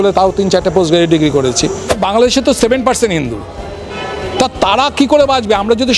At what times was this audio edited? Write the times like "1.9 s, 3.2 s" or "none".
1.9 s